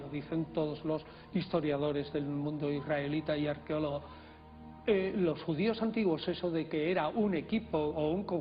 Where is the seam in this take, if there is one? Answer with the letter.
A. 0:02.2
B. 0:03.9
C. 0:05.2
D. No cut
C